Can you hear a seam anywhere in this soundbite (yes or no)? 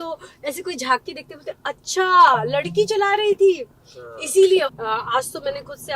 yes